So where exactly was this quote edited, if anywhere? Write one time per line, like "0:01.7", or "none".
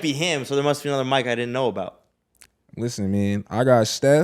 none